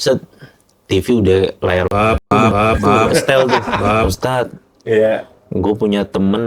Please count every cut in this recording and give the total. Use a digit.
1